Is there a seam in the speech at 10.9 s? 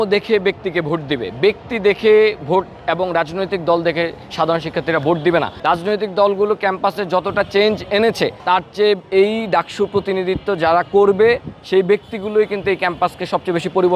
no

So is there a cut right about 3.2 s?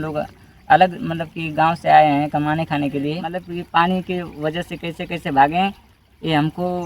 yes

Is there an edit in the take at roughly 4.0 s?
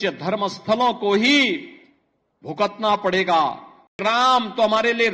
yes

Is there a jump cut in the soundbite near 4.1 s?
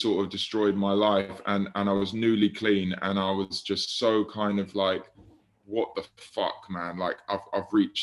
no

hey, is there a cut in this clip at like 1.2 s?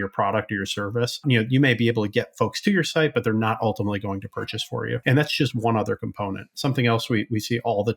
yes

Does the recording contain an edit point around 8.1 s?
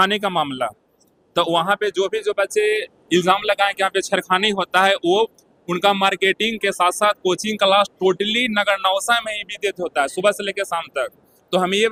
no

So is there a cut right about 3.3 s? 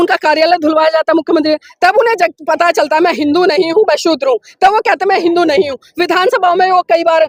no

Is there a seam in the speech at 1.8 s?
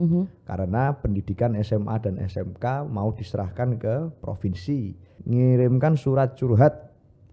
no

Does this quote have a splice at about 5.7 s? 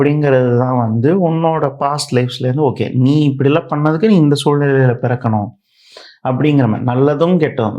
no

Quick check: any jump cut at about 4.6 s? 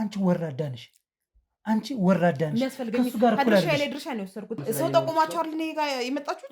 yes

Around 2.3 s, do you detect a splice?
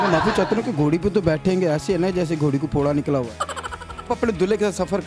no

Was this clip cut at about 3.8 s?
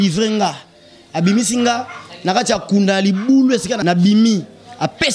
yes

